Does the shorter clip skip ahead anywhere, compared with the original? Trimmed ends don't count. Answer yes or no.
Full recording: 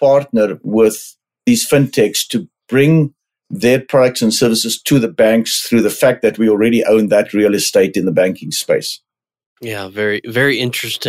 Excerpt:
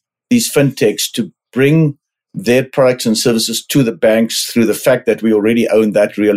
no